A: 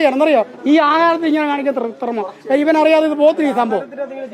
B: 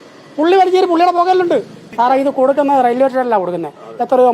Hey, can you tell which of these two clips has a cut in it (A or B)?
B